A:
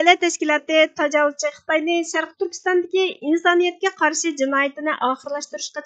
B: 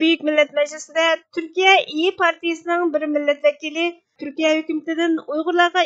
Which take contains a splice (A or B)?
B